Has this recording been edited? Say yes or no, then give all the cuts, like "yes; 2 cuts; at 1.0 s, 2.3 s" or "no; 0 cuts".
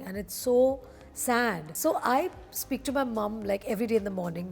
yes; 1 cut; at 1.7 s